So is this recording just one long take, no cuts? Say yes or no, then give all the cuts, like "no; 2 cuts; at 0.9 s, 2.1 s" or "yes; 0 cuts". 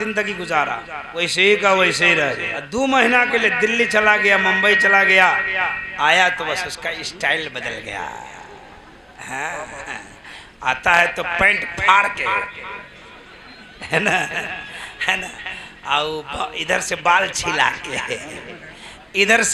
no; 2 cuts; at 1.0 s, 2.5 s